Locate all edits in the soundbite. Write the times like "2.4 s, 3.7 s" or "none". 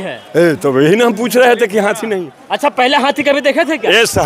none